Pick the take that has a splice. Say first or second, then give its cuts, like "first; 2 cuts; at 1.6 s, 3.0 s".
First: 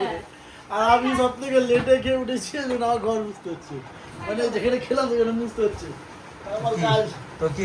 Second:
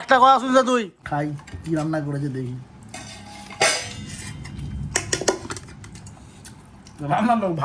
second; 1 cut; at 1.0 s